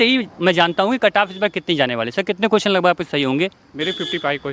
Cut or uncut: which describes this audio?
uncut